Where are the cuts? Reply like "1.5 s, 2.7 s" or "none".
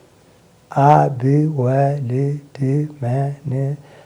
none